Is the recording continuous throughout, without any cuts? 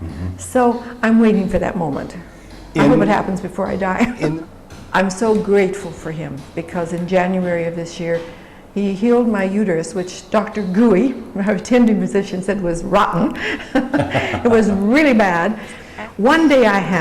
no; 2 cuts; at 4.3 s, 15.8 s

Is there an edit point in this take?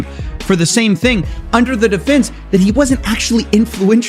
no; 0 cuts

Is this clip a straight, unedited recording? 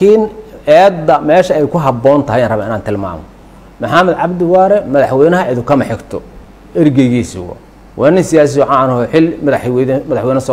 yes; 0 cuts

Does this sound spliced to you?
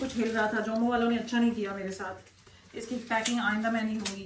no; 0 cuts

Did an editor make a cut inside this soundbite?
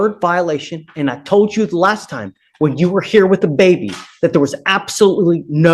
no; 0 cuts

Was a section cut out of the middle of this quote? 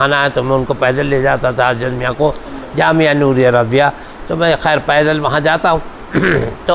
no; 0 cuts

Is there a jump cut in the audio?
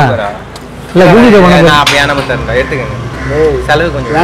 no; 0 cuts

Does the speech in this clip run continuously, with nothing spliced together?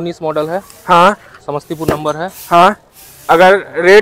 yes; 0 cuts

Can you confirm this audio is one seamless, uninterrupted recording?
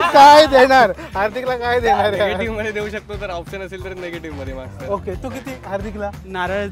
yes; 0 cuts

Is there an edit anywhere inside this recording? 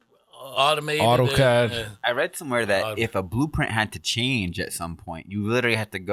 no; 0 cuts

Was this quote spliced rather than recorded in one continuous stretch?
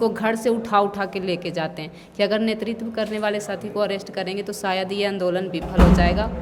no; 0 cuts

